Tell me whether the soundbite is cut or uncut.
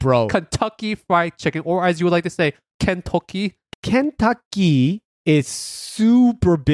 cut